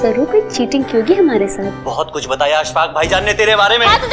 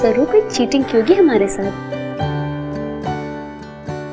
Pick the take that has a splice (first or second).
first